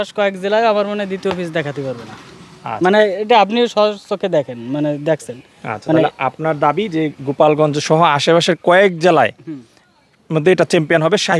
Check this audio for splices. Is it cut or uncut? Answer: uncut